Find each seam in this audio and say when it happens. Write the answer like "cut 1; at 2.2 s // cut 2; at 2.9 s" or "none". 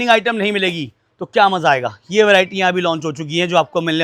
none